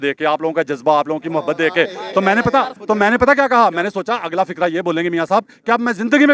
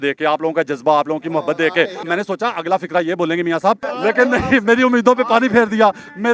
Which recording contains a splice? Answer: second; 2 cuts; at 2.1 s, 3.9 s

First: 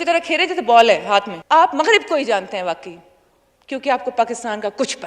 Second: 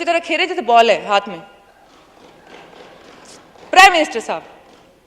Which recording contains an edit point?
first; 1 cut; at 1.4 s

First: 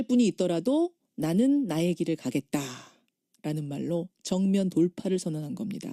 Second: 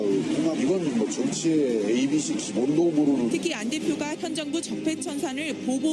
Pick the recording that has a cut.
first; 1 cut; at 2.9 s

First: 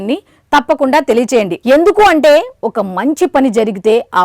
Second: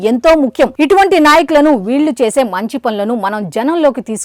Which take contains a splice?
first; 1 cut; at 1.6 s

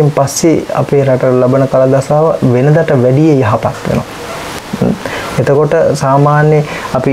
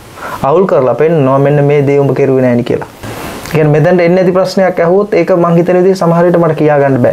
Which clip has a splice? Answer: second; 1 cut; at 3.0 s

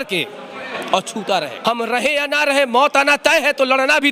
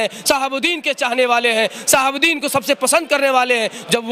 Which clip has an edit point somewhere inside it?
first; 1 cut; at 1.5 s

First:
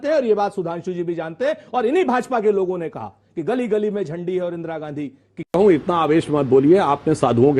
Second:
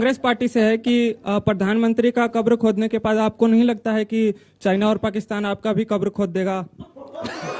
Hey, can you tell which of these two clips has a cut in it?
first; 1 cut; at 5.5 s

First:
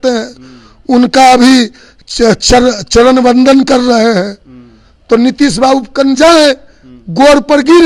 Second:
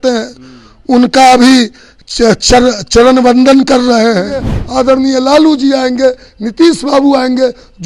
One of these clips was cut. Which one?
second; 1 cut; at 4.6 s

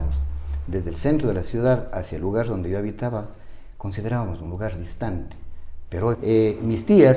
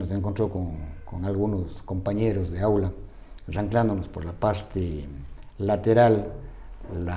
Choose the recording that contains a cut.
first; 1 cut; at 6.2 s

